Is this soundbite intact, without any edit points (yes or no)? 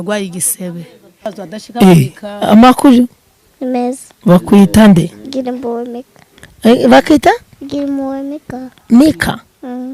no